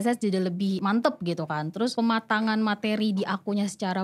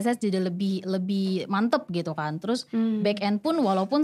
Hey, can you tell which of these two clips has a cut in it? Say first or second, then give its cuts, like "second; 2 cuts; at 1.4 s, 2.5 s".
first; 2 cuts; at 0.8 s, 2.0 s